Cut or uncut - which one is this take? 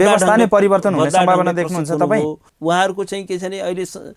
cut